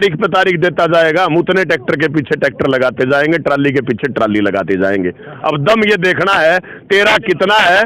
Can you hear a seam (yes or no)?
no